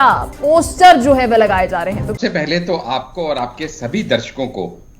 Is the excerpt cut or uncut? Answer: cut